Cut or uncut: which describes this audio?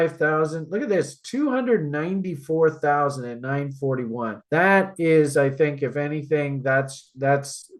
uncut